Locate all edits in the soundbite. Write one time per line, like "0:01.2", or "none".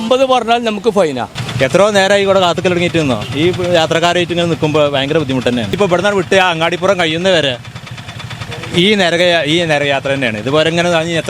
0:01.4
0:05.7